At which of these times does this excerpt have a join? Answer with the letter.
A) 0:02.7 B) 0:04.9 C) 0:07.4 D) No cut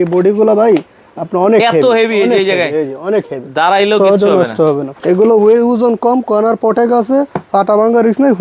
B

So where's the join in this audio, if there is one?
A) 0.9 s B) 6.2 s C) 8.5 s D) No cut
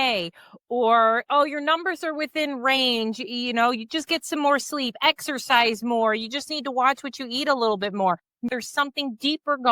C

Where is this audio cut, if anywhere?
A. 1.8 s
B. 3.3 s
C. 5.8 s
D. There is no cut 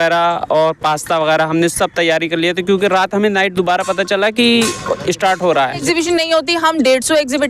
C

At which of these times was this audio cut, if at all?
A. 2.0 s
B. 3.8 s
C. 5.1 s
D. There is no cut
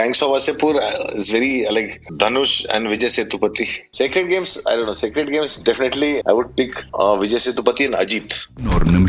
B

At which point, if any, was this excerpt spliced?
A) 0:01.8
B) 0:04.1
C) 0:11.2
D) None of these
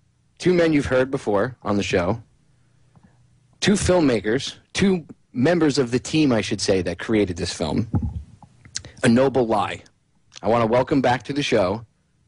C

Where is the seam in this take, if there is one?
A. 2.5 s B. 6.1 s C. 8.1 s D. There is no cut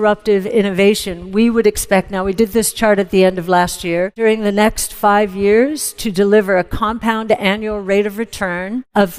D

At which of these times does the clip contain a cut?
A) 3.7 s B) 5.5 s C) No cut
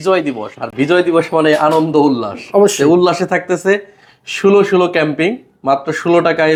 C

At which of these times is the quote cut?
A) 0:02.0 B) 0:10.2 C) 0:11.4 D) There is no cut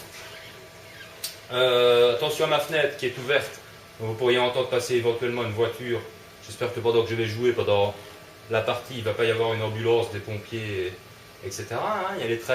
B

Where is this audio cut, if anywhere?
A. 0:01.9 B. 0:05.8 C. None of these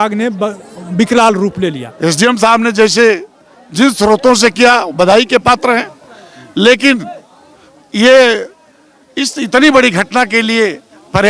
A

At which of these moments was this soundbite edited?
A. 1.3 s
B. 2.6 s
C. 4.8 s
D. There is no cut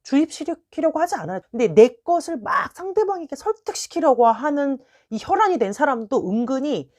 A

